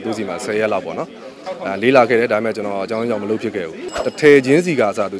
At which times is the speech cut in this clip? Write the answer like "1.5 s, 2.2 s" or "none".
3.8 s